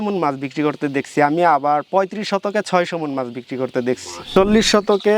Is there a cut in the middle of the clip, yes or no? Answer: yes